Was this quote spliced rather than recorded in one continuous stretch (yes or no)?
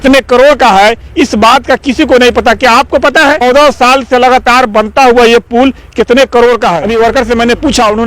yes